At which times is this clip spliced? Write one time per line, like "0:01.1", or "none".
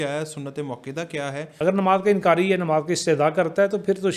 0:01.5

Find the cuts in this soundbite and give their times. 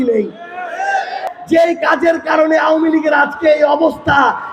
0:01.3

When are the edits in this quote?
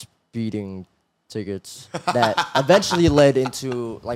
none

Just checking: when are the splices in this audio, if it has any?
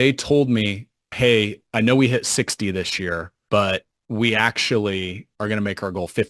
0:01.4
0:03.3
0:03.9
0:05.2

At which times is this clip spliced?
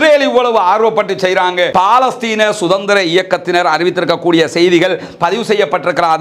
0:01.7

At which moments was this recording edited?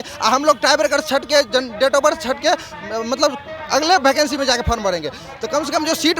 none

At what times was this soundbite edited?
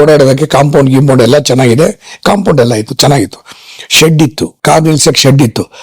0:04.6

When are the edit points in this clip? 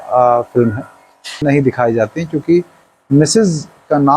0:01.3

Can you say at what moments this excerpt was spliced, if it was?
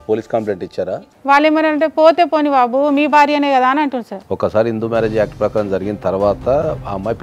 0:00.9
0:04.1

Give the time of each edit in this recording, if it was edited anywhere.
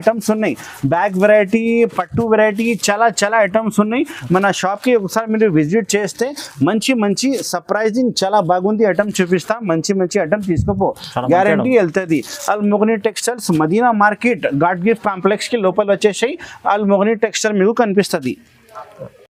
none

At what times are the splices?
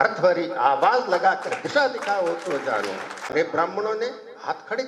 0:03.3

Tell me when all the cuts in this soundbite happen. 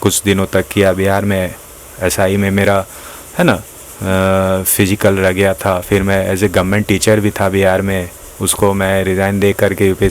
none

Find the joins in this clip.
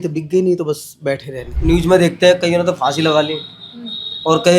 0:01.5

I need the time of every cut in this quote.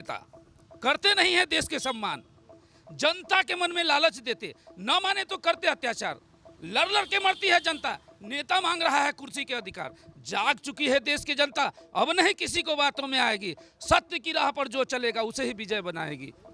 none

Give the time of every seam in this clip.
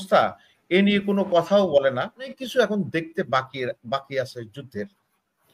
0:02.4

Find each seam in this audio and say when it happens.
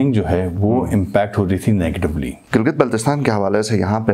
0:02.4

